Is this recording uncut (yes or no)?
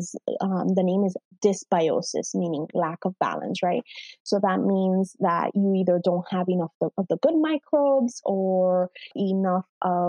no